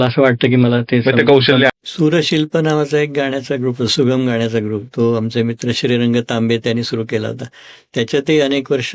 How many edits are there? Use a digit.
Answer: 1